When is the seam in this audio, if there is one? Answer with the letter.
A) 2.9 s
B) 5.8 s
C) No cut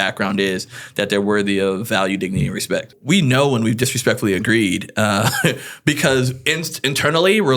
A